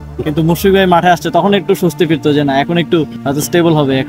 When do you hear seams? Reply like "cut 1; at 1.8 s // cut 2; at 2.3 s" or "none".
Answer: cut 1; at 3.2 s